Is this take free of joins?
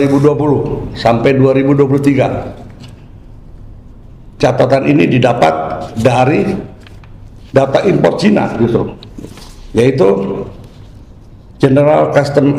yes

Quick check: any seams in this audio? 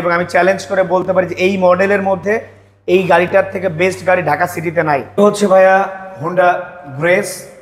yes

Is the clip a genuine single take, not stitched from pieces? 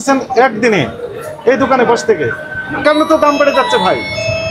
no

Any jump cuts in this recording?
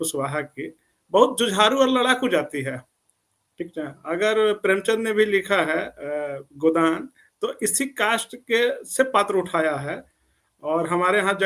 no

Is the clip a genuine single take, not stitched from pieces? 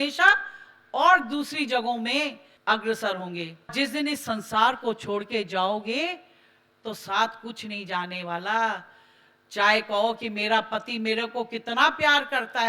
no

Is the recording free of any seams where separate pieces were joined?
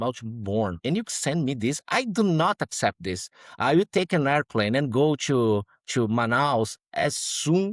yes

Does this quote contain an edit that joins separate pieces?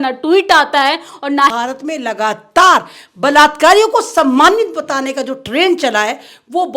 yes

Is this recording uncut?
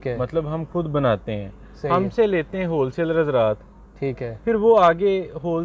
yes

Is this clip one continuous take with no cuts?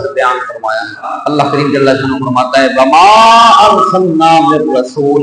no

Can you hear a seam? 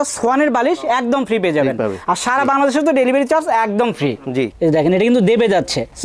yes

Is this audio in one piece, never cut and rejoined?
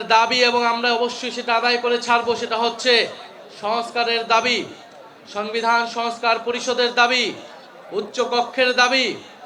yes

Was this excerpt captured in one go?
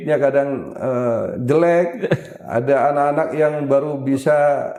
yes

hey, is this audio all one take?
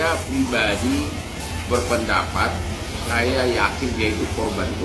yes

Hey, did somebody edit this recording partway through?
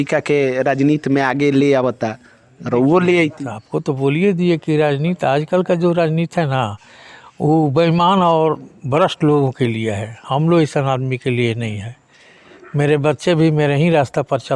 no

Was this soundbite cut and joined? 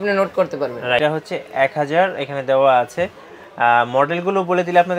yes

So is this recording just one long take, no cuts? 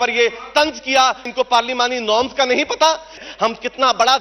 no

